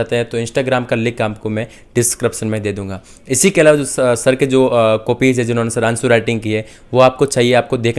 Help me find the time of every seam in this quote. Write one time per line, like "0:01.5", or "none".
none